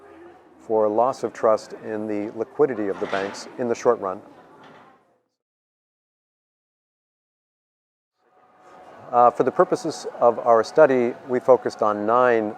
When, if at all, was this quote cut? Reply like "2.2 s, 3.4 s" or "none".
none